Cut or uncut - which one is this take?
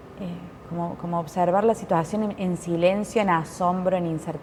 uncut